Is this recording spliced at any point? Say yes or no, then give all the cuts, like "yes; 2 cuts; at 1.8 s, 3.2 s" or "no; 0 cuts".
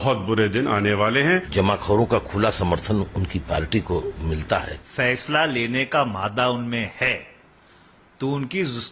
yes; 2 cuts; at 1.5 s, 4.7 s